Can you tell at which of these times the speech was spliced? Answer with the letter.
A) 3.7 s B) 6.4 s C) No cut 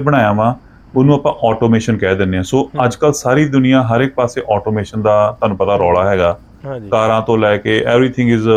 C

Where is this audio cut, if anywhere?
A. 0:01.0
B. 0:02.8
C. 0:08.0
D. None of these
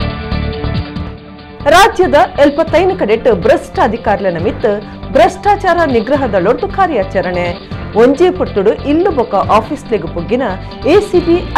A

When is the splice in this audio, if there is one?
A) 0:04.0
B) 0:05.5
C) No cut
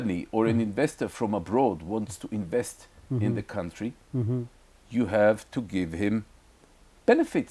C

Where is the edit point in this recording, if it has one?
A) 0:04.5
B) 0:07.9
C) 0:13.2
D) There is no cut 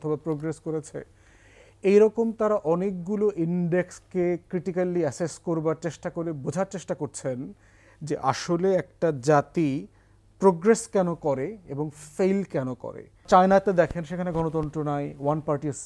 C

